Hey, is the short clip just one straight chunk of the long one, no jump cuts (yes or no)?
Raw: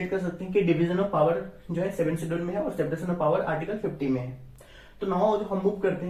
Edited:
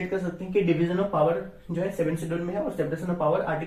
yes